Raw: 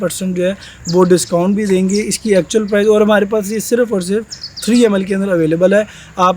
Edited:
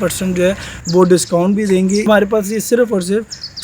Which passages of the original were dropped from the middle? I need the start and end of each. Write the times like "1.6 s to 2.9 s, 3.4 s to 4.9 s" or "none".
2.1 s to 3.1 s